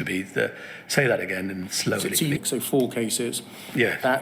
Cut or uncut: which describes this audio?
cut